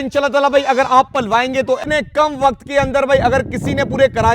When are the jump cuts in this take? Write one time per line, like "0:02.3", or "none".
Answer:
0:01.8

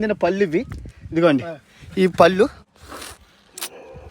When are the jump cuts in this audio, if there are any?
0:02.6

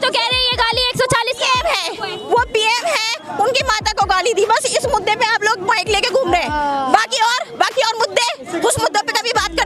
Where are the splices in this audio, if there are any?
0:08.4

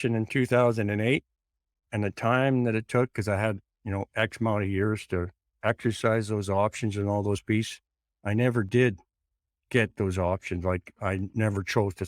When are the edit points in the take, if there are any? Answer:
0:01.9

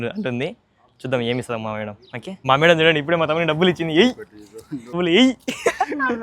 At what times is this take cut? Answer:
0:02.2
0:05.0

